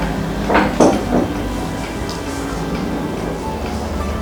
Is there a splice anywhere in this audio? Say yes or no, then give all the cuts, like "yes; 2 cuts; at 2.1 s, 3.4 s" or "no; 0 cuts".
no; 0 cuts